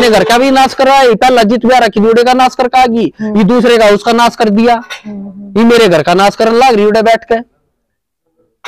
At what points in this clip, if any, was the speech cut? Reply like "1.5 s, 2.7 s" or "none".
none